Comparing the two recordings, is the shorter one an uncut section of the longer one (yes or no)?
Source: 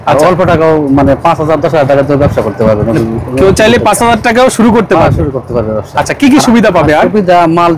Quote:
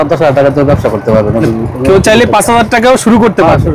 yes